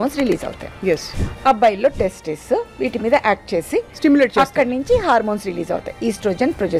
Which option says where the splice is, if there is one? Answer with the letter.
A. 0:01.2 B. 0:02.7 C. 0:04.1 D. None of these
A